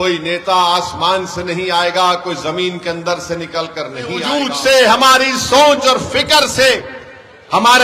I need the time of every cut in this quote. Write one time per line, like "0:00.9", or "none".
0:04.3